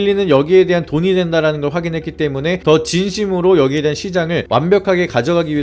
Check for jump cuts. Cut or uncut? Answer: uncut